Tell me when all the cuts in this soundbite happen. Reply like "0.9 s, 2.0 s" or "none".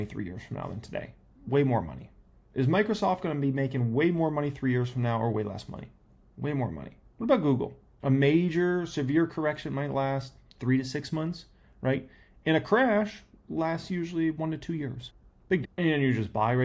7.8 s, 15.5 s